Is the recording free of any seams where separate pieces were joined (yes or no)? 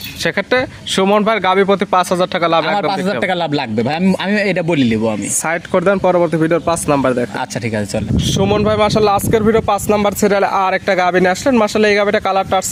yes